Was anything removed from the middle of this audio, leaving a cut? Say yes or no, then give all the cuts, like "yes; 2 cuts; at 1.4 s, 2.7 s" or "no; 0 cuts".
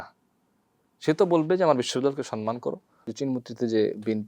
yes; 1 cut; at 3.0 s